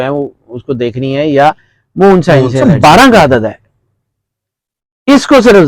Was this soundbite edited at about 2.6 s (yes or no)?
yes